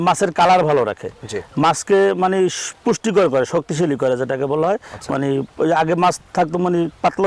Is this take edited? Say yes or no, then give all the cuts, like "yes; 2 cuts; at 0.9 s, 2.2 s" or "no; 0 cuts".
no; 0 cuts